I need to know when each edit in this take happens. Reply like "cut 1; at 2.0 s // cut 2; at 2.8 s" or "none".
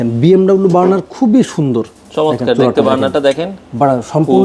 none